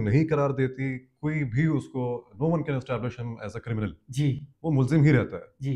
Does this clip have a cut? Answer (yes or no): no